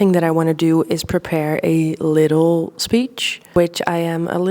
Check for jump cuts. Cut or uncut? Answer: cut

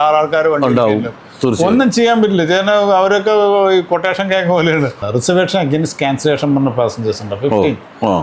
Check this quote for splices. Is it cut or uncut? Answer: cut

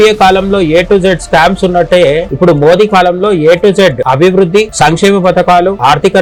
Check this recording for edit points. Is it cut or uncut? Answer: uncut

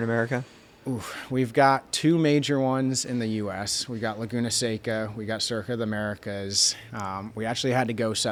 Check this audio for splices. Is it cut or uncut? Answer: uncut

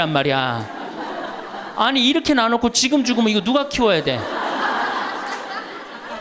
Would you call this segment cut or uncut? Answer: uncut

